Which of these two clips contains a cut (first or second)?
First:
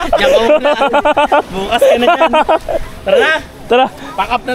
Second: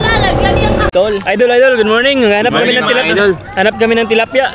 second